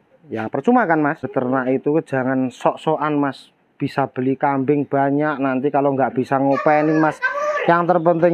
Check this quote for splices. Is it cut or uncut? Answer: cut